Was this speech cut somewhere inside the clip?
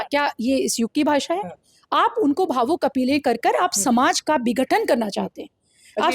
no; 0 cuts

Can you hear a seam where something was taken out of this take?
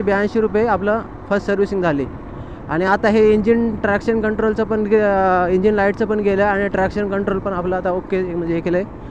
no; 0 cuts

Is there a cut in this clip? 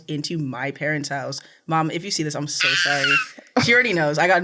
no; 0 cuts

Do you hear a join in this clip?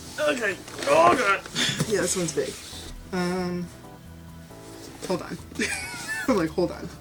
no; 0 cuts

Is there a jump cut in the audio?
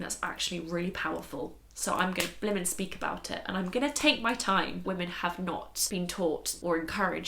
yes; 2 cuts; at 4.8 s, 6.3 s

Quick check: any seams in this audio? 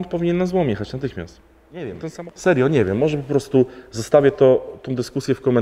yes; 1 cut; at 2.0 s

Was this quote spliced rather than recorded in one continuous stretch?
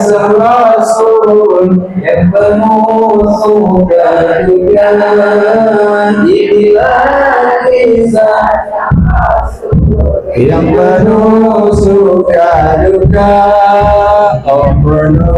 no; 0 cuts

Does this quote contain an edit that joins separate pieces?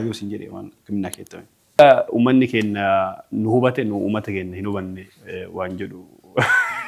yes; 1 cut; at 1.6 s

